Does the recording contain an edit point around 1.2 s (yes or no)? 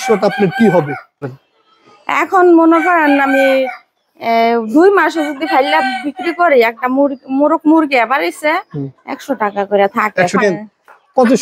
yes